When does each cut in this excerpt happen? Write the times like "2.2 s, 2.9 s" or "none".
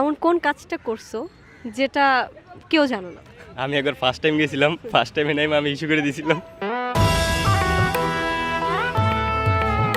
none